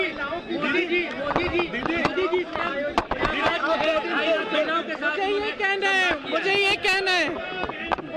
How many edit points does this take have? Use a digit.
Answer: 1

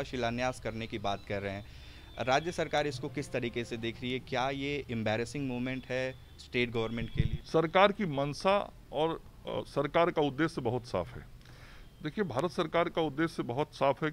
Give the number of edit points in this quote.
1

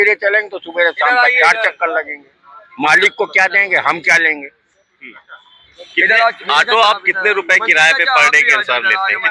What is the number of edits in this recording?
0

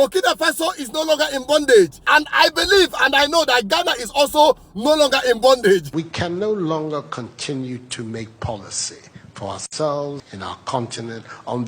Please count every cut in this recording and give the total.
2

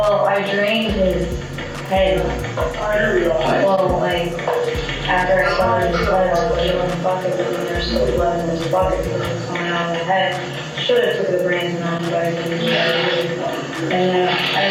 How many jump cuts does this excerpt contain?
0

